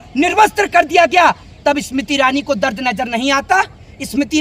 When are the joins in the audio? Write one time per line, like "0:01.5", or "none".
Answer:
none